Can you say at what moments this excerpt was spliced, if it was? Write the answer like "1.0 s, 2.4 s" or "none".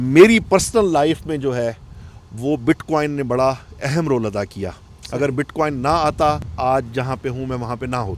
6.5 s